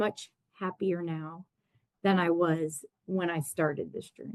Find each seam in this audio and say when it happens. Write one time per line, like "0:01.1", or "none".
none